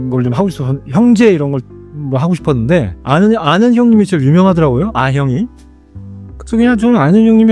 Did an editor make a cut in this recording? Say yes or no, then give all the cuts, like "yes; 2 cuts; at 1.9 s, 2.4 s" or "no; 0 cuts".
no; 0 cuts